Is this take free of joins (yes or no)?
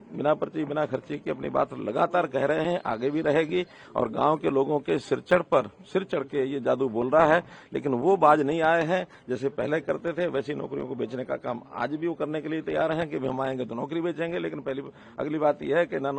yes